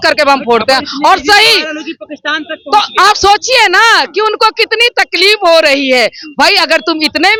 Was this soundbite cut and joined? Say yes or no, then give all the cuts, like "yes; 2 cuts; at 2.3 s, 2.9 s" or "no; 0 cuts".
no; 0 cuts